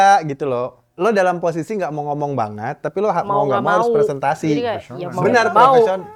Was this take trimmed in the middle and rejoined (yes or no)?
no